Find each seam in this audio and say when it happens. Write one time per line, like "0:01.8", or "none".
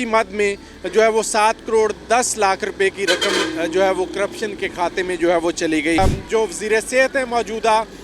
0:06.0